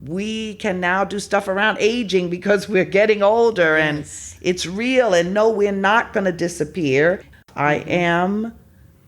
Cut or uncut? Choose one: cut